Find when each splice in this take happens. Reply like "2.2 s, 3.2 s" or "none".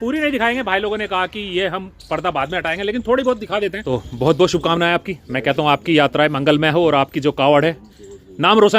3.8 s